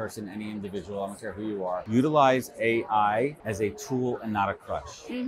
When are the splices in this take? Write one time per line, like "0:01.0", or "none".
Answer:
0:01.8
0:03.4

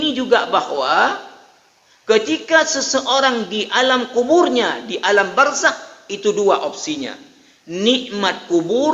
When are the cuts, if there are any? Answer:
none

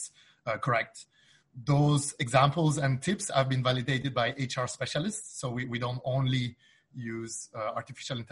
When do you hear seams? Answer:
none

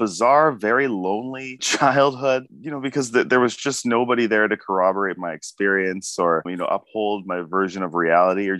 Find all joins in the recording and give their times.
none

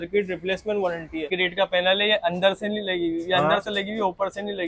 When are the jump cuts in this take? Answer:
0:01.4

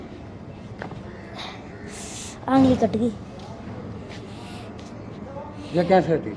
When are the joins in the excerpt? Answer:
none

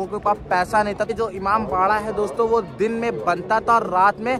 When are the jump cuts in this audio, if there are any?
0:01.1

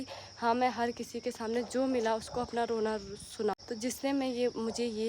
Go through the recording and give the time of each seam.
0:03.5

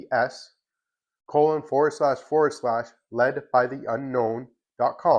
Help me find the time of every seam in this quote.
none

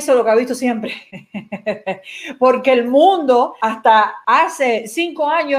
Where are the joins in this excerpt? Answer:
0:04.0

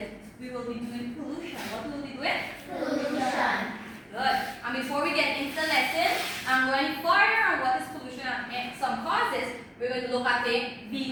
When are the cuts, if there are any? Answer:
none

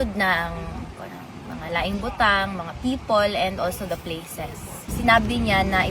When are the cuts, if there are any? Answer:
0:04.9

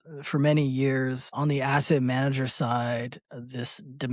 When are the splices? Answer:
0:01.2

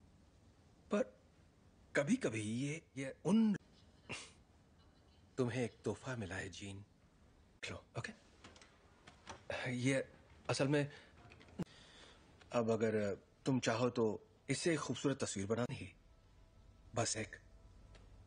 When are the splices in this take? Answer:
none

